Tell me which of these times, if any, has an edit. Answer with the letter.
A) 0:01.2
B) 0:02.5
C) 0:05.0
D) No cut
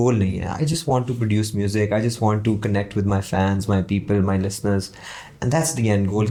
D